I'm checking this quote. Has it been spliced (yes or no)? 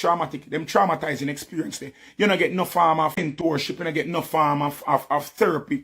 yes